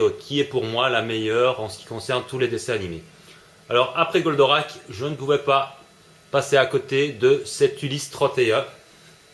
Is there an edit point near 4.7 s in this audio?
no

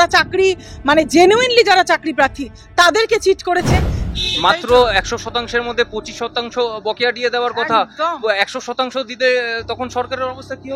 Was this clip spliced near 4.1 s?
yes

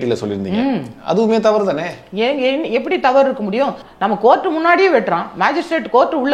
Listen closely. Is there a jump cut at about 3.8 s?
yes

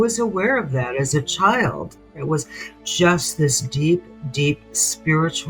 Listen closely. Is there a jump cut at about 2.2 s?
yes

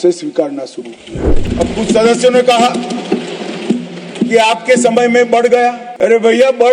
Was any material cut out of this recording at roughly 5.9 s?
yes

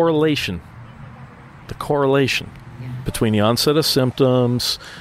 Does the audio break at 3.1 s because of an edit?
yes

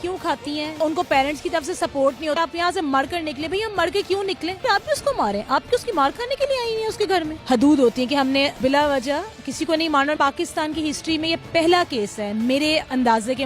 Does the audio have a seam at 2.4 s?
yes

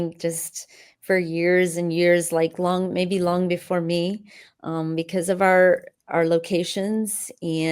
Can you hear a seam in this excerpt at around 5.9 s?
yes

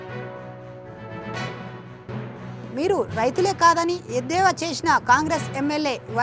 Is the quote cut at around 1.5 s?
yes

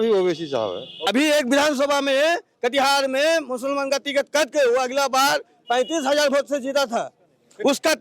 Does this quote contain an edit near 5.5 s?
no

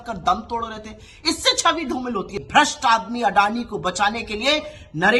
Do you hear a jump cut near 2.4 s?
yes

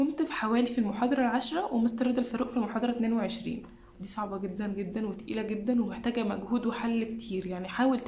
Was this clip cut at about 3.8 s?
yes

